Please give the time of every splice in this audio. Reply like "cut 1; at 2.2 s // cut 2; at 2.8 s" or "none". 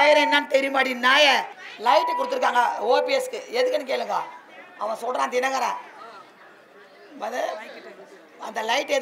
cut 1; at 1.7 s